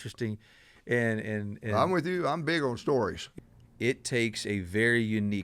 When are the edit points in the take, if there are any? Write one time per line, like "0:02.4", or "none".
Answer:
0:03.2